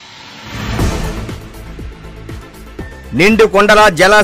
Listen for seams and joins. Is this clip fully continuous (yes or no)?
no